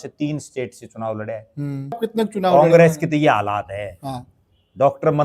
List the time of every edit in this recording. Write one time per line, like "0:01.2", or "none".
0:02.0